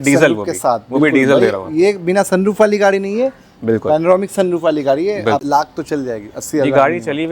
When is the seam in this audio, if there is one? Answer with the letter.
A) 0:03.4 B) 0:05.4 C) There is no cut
B